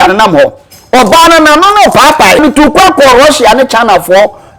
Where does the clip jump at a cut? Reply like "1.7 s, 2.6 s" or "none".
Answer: 2.4 s